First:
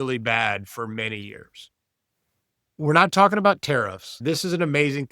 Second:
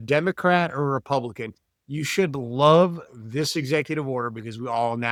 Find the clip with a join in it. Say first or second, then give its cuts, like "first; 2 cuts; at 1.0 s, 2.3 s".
first; 2 cuts; at 2.7 s, 4.2 s